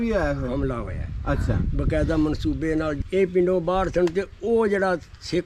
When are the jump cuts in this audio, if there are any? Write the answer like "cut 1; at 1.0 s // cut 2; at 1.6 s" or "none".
cut 1; at 3.0 s